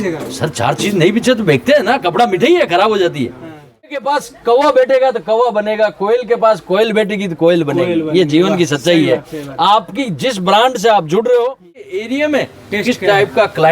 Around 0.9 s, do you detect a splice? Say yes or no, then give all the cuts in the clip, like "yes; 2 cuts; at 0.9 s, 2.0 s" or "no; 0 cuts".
no; 2 cuts; at 4.0 s, 12.0 s